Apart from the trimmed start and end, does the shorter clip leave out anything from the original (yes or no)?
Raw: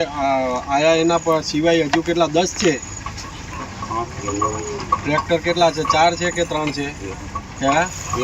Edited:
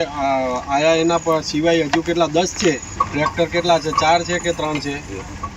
yes